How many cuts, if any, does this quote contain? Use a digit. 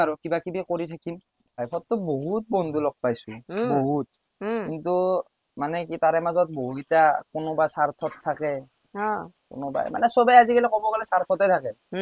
1